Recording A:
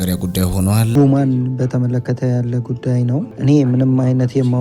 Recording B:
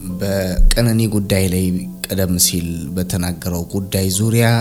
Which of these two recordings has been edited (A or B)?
A